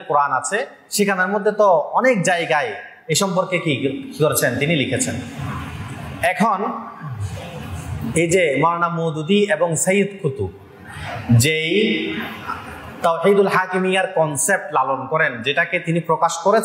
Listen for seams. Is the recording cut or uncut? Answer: uncut